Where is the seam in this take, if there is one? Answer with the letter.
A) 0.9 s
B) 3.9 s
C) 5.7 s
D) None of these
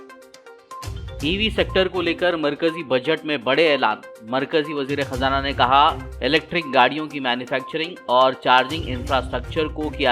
A